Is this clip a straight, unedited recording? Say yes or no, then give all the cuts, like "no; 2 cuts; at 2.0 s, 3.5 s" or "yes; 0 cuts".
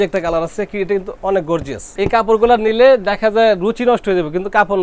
no; 1 cut; at 1.8 s